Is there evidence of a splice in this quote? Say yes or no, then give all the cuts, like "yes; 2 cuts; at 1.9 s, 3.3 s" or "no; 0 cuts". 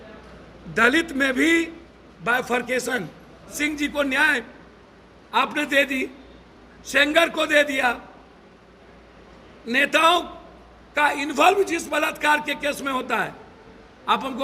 yes; 1 cut; at 3.5 s